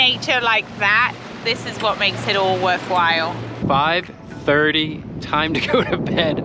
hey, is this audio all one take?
no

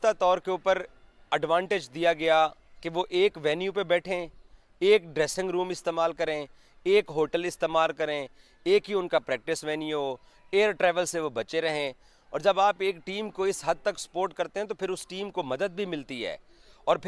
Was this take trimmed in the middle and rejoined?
no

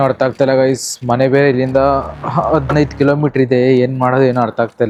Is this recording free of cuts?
yes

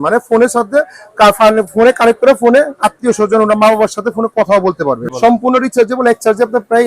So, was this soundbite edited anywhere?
yes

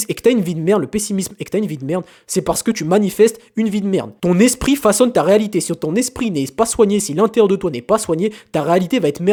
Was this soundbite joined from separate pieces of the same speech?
no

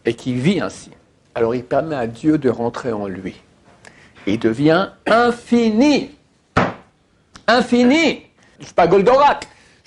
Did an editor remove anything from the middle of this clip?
yes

